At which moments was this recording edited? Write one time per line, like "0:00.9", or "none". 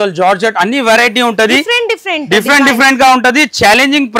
none